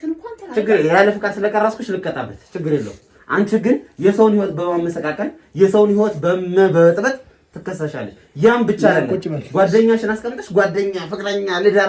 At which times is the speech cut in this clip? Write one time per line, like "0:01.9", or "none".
none